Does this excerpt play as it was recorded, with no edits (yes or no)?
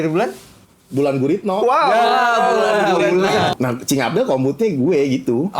no